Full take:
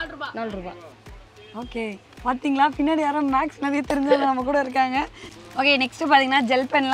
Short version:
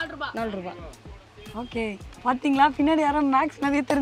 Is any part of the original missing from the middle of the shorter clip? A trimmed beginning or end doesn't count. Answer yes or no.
no